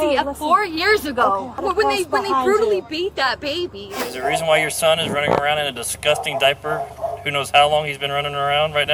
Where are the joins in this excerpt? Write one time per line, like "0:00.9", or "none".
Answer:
0:01.6
0:04.0